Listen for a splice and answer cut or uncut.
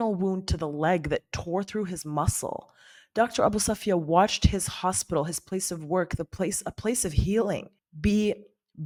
uncut